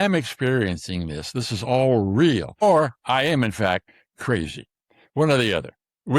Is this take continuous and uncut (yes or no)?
no